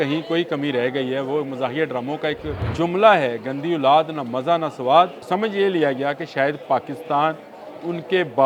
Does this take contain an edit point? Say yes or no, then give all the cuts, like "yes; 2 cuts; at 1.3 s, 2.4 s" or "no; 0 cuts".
yes; 2 cuts; at 2.6 s, 5.2 s